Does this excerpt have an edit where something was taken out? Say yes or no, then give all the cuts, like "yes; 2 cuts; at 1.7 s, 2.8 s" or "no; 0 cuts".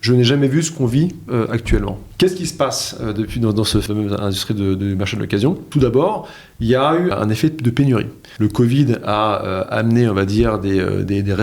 yes; 5 cuts; at 2.0 s, 3.8 s, 5.7 s, 7.1 s, 8.2 s